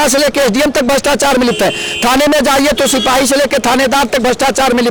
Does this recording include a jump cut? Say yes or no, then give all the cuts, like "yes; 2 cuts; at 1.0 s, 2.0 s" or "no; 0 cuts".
no; 0 cuts